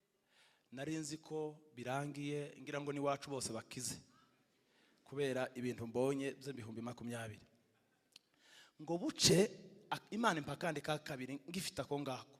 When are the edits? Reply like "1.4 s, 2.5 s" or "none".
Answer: none

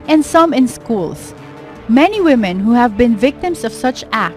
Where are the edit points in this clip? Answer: 3.1 s

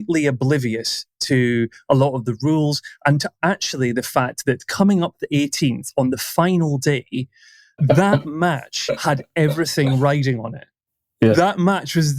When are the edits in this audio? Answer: 7.8 s

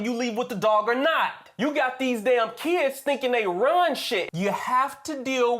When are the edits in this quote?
4.3 s

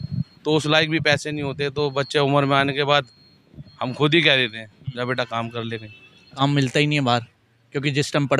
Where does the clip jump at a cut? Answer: 6.4 s

